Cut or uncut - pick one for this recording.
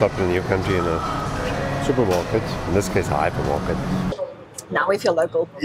cut